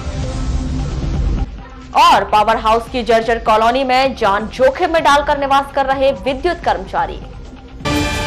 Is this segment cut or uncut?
cut